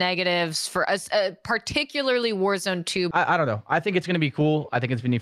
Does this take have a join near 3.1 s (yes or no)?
yes